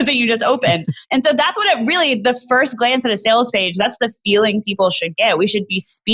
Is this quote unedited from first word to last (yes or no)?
no